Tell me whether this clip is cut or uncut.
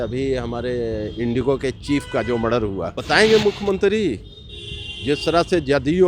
cut